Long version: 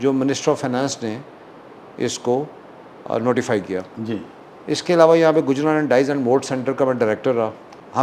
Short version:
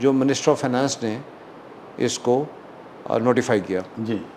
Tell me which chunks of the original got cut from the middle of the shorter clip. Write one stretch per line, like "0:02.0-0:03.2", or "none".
none